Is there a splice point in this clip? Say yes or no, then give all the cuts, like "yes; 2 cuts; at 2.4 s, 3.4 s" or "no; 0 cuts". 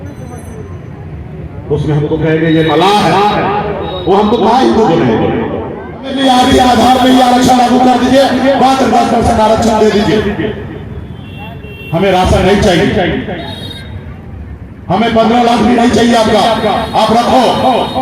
yes; 1 cut; at 6.1 s